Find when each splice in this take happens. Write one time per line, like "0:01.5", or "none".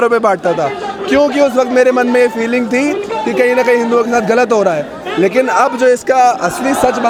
none

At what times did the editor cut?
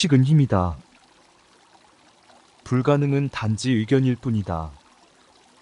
0:00.8
0:02.4
0:04.7

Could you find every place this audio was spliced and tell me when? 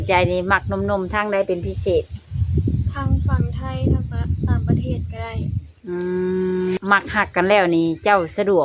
0:06.8

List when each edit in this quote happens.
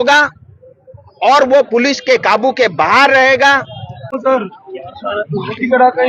0:04.2

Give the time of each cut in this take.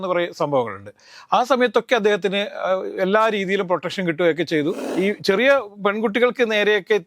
0:04.8

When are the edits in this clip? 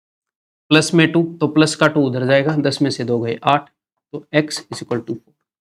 none

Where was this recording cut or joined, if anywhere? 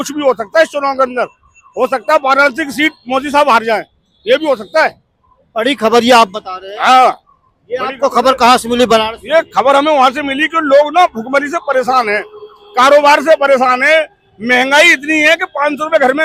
none

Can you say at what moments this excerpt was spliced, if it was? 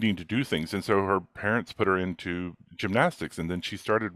none

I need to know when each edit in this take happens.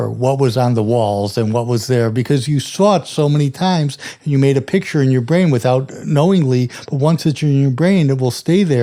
none

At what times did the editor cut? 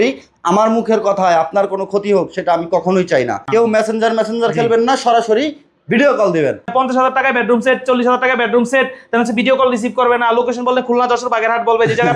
0:03.4
0:06.6

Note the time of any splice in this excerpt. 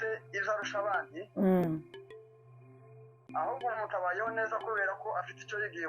0:01.8
0:03.2

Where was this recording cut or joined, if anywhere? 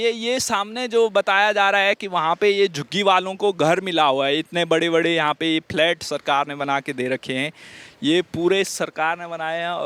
none

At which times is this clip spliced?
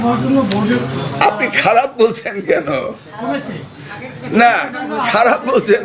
none

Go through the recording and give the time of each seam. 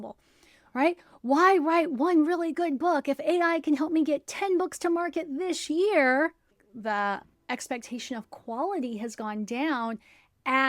0:06.7

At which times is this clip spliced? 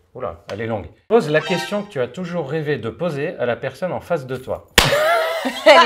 none

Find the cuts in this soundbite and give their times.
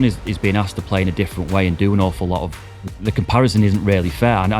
0:02.7

